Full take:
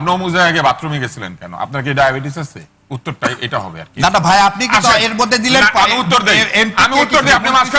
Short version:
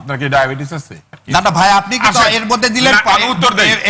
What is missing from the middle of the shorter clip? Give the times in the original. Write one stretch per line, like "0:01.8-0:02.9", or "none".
0:02.8-0:03.8